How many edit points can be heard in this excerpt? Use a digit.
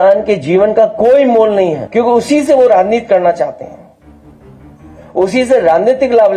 1